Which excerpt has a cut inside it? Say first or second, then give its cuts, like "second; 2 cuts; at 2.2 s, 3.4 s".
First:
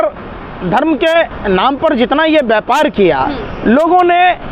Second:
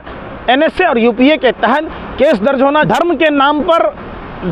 second; 1 cut; at 2.9 s